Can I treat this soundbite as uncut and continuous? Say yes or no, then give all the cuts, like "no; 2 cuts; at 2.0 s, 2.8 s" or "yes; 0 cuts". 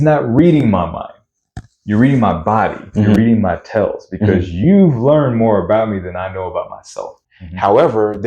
no; 1 cut; at 7.1 s